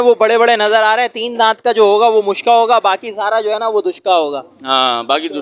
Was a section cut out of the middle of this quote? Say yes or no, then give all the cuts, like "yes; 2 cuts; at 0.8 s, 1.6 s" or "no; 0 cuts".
no; 0 cuts